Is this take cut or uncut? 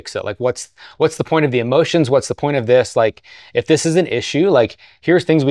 uncut